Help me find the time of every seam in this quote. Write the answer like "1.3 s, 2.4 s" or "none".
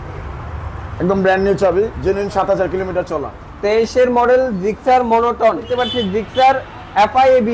5.7 s